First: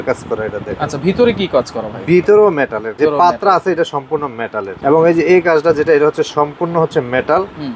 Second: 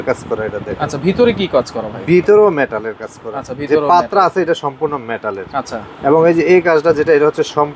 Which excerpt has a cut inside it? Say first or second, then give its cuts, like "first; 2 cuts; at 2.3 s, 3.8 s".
first; 2 cuts; at 2.8 s, 4.7 s